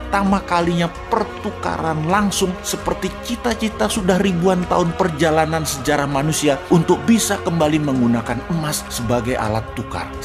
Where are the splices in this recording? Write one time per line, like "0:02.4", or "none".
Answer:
none